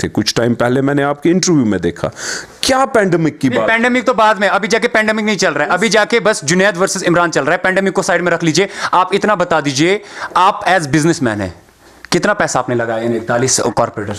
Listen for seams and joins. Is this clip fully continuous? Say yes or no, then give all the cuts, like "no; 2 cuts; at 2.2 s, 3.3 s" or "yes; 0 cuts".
yes; 0 cuts